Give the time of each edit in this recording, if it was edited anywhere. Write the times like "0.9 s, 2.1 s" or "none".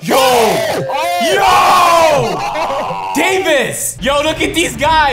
3.9 s